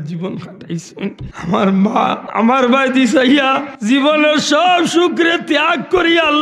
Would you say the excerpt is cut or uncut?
cut